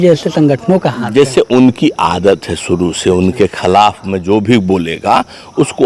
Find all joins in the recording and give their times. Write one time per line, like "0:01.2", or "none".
none